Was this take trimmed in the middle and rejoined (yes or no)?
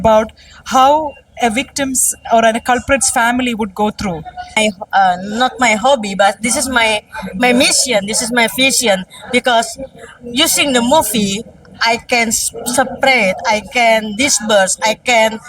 yes